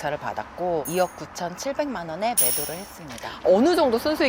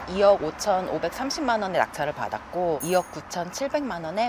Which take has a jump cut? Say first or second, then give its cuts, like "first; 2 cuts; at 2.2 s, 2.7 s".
first; 1 cut; at 3.4 s